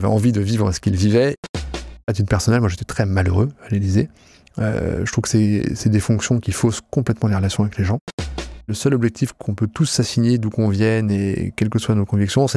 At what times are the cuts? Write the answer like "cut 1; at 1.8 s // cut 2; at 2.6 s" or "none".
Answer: cut 1; at 1.4 s // cut 2; at 8.7 s

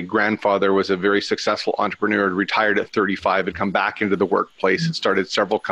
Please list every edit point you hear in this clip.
none

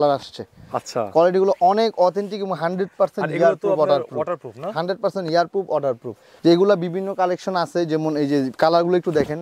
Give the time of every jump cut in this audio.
none

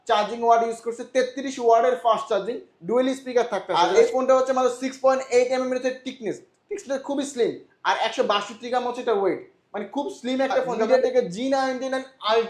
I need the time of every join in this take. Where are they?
cut 1; at 3.7 s // cut 2; at 10.9 s

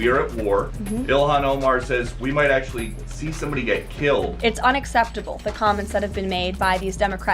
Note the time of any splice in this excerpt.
cut 1; at 5.2 s

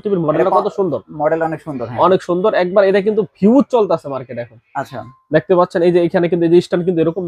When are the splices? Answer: none

